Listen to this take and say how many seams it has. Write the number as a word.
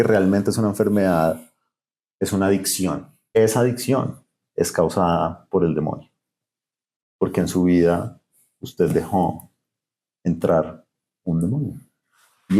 one